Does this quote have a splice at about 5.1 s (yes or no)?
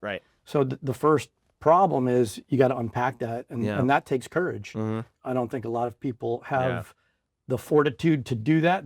yes